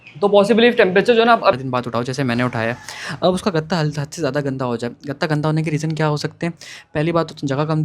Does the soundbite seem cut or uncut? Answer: cut